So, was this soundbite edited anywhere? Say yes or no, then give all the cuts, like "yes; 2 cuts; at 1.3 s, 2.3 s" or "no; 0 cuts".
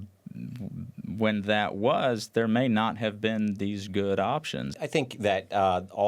yes; 1 cut; at 4.7 s